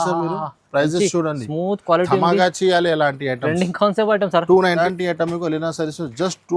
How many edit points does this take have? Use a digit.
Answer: 1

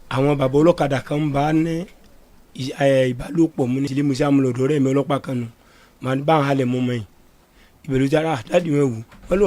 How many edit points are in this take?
1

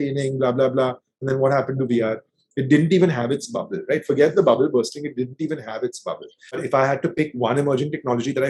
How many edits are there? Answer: 1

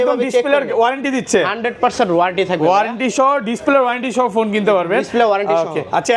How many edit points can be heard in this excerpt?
0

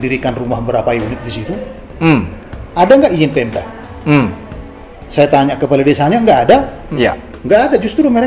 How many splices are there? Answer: 1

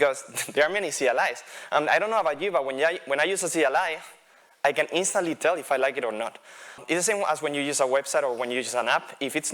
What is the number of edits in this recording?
1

